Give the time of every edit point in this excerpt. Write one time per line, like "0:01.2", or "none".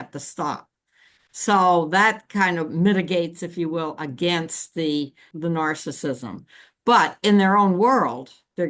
0:05.3